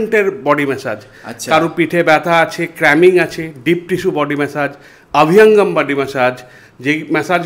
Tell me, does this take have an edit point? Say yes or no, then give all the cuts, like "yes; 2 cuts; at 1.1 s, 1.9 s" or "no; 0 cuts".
no; 0 cuts